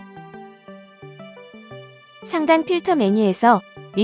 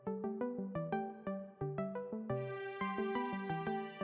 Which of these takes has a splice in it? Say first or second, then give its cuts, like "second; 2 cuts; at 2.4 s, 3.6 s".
first; 1 cut; at 1.6 s